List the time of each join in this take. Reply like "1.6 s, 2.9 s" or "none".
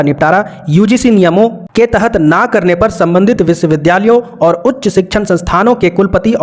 none